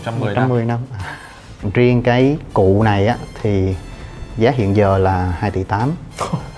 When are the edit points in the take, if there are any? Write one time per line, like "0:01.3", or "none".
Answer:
0:01.6